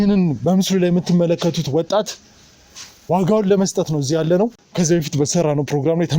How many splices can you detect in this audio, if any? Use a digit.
1